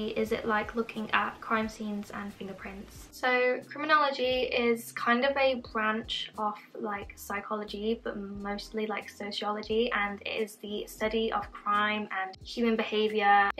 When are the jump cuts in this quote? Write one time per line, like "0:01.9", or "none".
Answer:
none